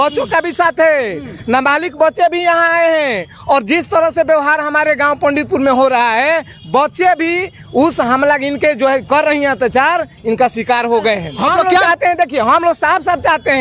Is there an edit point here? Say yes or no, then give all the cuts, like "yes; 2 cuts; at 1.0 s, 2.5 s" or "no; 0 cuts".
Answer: yes; 1 cut; at 11.8 s